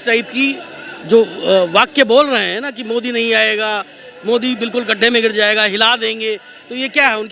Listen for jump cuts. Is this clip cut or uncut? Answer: uncut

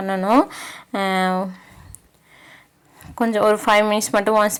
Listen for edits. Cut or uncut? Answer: uncut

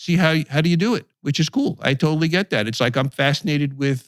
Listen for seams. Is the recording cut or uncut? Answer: uncut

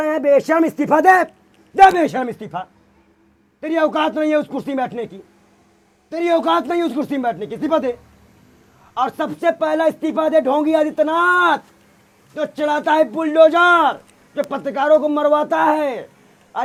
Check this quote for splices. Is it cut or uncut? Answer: uncut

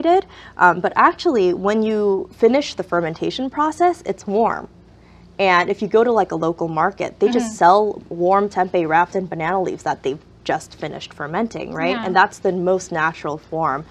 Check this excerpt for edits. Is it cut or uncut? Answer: uncut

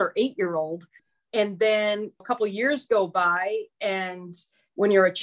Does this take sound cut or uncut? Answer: cut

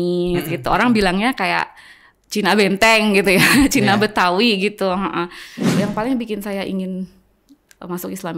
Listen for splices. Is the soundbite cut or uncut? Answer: cut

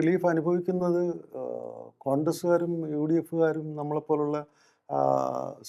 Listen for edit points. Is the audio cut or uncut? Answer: uncut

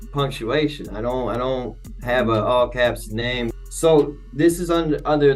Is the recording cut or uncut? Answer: cut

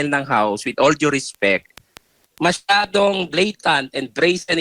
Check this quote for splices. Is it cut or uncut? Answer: cut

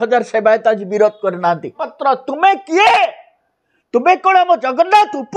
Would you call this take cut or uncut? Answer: cut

